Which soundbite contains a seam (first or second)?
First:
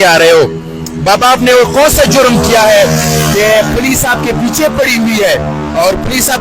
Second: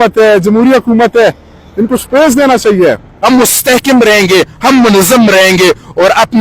second